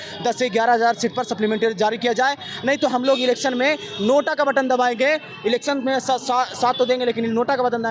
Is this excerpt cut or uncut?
uncut